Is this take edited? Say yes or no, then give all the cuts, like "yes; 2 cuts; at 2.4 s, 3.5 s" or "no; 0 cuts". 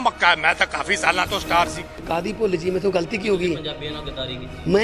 yes; 1 cut; at 2.0 s